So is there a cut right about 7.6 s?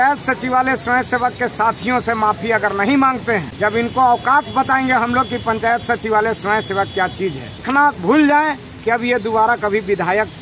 yes; 2 cuts; at 3.5 s, 7.6 s

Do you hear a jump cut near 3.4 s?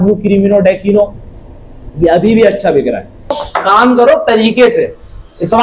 yes; 1 cut; at 3.4 s

